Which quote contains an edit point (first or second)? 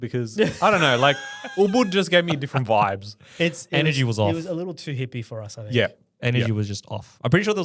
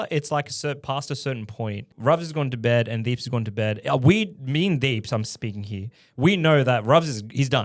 second